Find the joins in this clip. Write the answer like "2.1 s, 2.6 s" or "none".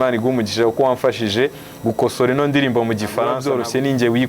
3.4 s